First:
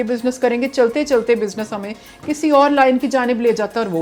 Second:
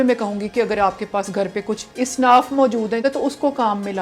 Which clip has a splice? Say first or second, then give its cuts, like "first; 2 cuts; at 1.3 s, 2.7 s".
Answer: second; 2 cuts; at 1.9 s, 3.0 s